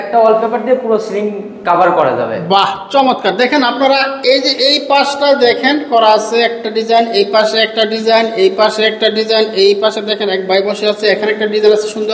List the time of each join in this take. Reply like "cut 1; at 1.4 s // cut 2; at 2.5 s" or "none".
none